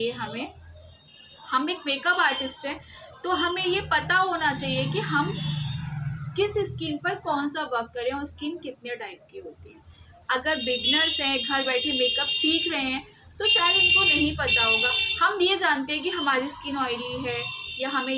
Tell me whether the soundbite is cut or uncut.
uncut